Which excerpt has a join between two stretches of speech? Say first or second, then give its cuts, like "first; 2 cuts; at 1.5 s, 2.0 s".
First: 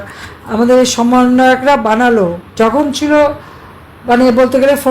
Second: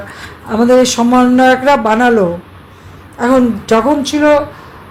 first; 1 cut; at 2.5 s